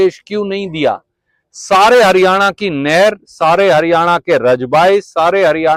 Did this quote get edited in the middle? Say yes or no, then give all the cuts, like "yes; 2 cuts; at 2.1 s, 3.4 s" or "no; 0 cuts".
no; 0 cuts